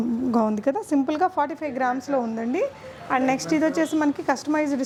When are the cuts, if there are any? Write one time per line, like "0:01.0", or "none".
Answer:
none